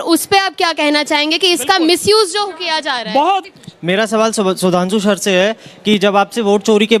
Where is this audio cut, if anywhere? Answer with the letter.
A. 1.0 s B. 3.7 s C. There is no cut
C